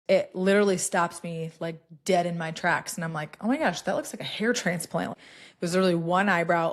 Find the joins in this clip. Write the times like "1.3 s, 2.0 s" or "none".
5.1 s